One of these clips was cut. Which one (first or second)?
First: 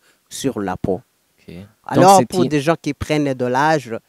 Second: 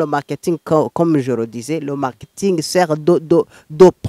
first